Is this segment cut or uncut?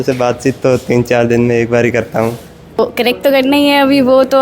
cut